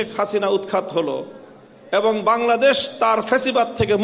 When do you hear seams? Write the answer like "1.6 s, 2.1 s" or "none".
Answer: none